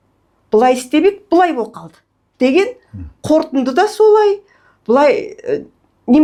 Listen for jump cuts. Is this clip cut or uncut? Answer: uncut